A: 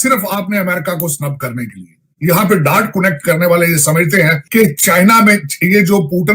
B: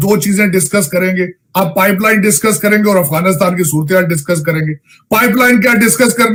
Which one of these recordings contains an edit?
A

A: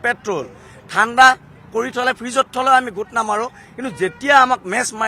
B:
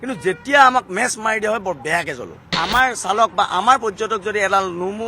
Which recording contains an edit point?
B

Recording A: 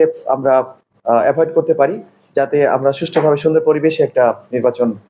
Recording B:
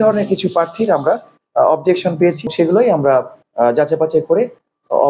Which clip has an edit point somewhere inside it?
B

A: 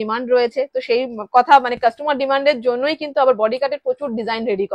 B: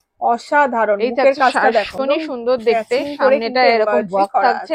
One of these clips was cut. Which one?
B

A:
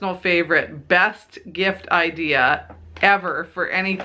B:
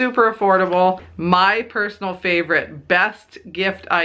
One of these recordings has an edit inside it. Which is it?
B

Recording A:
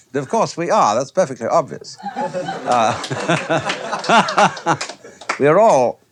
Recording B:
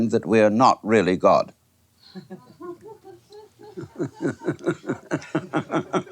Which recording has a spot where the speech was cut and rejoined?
B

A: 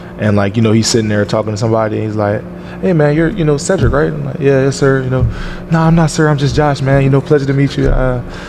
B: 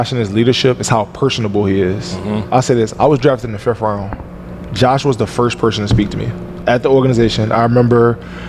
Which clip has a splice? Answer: B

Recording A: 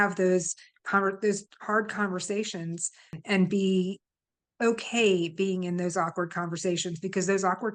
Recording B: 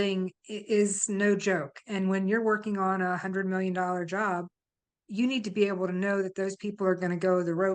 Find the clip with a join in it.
A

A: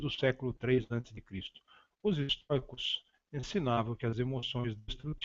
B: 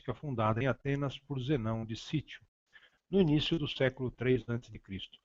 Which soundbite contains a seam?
B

